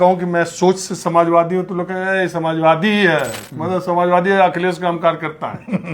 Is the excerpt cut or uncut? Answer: uncut